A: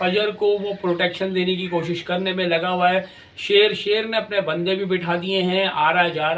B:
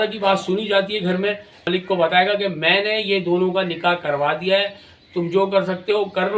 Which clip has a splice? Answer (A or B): B